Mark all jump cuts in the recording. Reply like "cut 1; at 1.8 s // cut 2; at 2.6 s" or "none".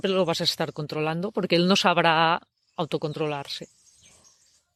none